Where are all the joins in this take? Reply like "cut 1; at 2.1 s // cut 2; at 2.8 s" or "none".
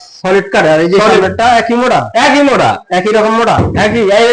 none